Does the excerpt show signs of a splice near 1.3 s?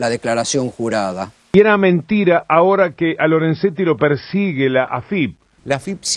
yes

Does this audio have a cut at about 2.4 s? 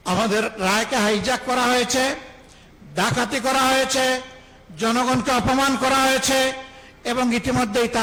no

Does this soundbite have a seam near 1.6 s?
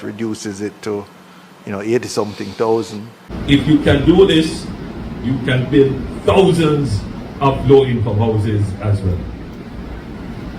no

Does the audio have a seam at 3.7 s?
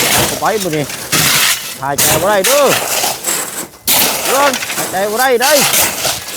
no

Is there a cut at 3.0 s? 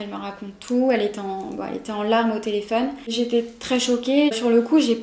yes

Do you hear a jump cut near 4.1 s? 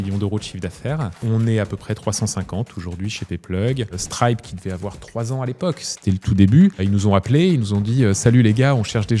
yes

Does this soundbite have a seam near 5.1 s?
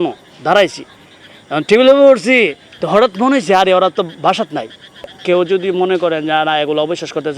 yes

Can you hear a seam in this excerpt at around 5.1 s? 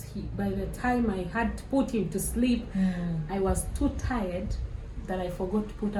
no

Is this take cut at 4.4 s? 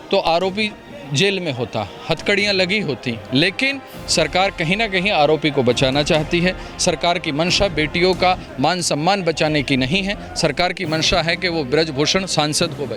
no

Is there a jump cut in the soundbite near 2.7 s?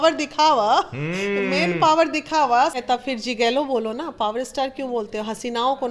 yes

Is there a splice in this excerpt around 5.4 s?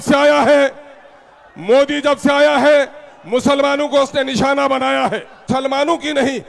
yes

